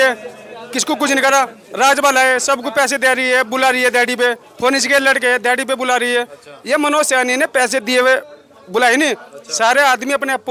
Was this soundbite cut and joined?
no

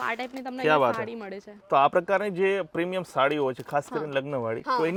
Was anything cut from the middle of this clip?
no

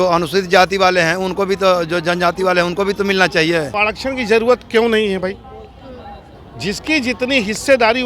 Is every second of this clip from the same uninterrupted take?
no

